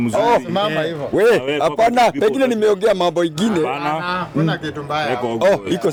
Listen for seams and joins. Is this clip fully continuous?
yes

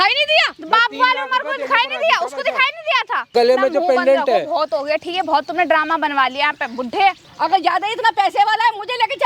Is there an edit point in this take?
yes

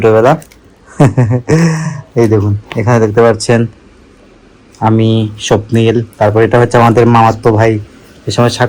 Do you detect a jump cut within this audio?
no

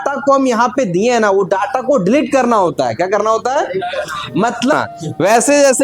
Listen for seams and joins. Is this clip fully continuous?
no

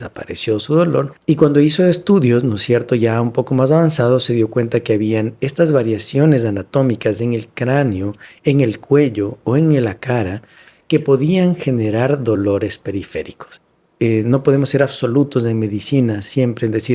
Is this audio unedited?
no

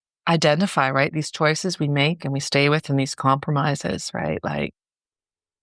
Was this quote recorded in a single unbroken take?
yes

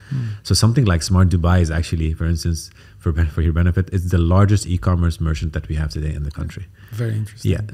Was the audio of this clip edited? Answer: no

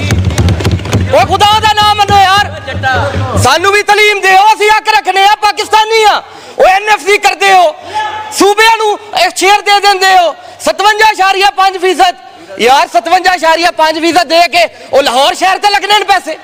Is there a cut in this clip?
no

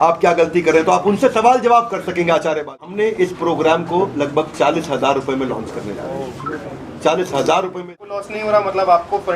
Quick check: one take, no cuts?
no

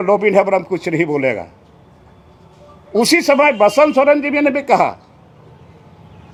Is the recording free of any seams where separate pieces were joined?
yes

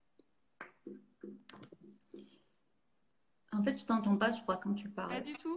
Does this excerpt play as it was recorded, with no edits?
no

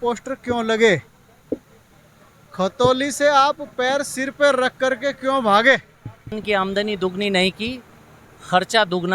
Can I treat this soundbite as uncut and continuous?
no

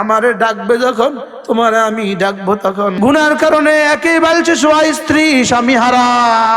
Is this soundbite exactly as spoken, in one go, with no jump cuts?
no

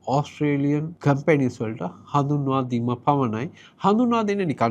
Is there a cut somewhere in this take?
yes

